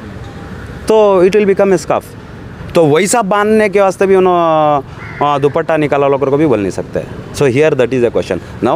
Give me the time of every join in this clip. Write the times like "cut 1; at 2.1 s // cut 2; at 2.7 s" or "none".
none